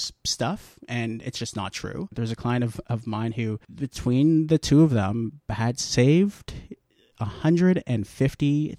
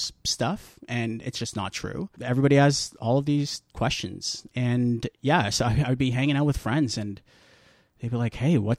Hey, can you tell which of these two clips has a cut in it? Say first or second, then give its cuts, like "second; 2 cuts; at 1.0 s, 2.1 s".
first; 1 cut; at 2.1 s